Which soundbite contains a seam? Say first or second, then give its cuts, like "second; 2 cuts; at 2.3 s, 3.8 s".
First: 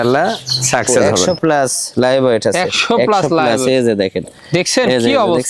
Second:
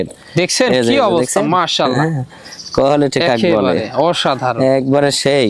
first; 1 cut; at 1.1 s